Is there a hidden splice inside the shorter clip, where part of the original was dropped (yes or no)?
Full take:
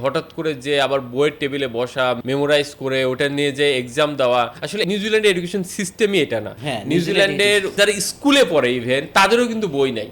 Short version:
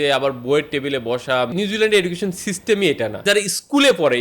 yes